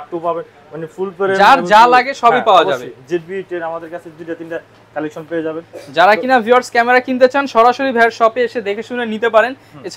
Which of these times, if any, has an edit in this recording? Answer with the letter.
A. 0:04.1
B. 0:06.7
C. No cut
C